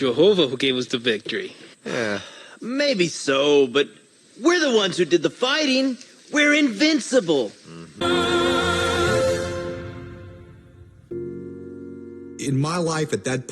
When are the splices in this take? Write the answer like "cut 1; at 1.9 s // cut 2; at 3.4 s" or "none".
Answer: cut 1; at 7.9 s // cut 2; at 11.1 s